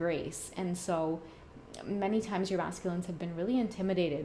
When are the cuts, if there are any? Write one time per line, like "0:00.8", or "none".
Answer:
none